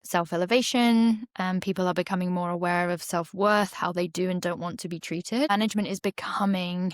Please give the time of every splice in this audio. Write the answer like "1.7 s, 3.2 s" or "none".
5.5 s